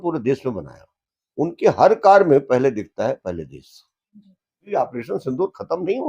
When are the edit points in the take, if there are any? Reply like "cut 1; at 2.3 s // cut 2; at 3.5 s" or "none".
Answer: cut 1; at 4.6 s

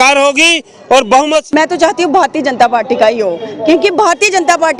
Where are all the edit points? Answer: cut 1; at 1.5 s

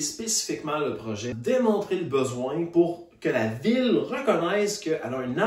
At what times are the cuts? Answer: cut 1; at 1.3 s

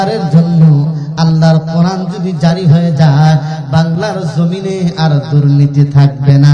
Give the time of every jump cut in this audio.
none

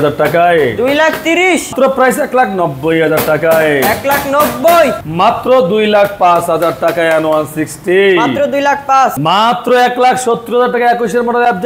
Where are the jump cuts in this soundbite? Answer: cut 1; at 1.7 s // cut 2; at 5.0 s // cut 3; at 9.2 s

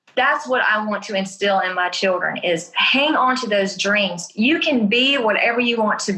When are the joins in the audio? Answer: none

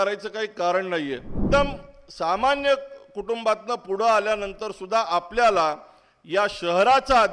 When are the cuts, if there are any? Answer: cut 1; at 1.4 s

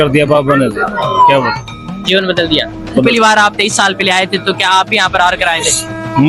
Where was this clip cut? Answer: none

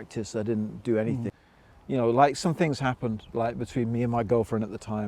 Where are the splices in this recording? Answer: cut 1; at 1.3 s

